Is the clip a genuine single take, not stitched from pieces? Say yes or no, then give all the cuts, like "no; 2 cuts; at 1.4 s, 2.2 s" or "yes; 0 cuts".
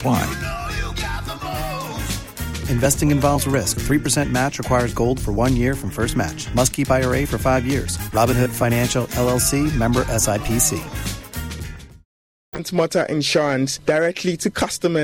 yes; 0 cuts